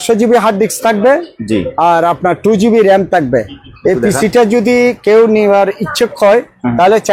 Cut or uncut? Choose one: uncut